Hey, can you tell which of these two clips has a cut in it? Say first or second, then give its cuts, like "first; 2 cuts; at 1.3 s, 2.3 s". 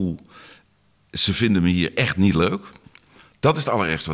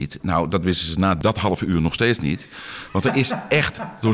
second; 1 cut; at 1.2 s